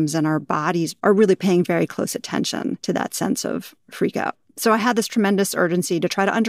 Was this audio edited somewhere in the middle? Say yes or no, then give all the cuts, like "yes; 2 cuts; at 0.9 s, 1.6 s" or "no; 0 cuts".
yes; 3 cuts; at 0.9 s, 2.8 s, 4.5 s